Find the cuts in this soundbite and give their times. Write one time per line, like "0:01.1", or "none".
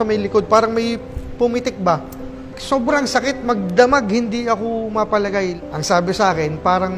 0:05.6